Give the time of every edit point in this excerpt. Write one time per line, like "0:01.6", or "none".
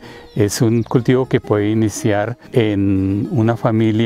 0:02.4